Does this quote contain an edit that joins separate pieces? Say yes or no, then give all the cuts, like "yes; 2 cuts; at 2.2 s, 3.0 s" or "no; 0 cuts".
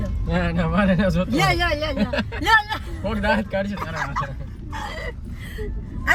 no; 0 cuts